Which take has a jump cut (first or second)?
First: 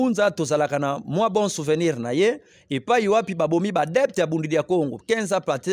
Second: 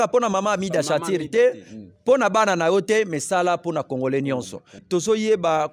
second